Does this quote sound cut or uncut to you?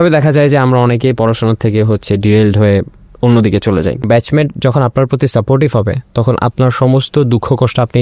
cut